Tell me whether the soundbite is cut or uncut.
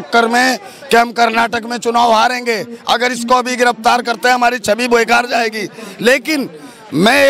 uncut